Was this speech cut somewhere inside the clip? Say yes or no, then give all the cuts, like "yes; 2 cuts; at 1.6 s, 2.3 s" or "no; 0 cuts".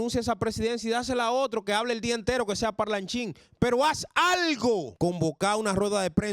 yes; 1 cut; at 4.9 s